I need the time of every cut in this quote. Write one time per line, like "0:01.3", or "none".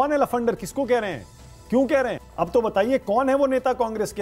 0:02.2

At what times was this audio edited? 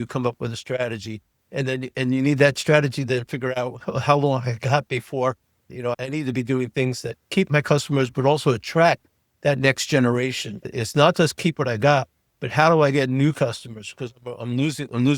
0:06.0
0:10.7

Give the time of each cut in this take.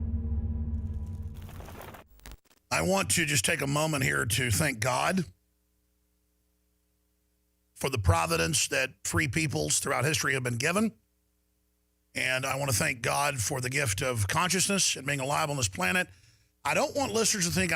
0:13.8

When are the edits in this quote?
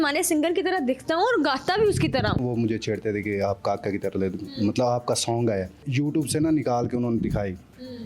0:02.4
0:05.9

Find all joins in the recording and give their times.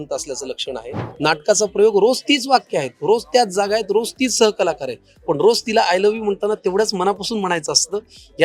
0:01.1

